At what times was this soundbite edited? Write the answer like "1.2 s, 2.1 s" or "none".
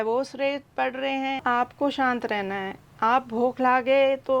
1.4 s